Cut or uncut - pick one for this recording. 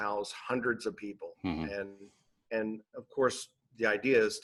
uncut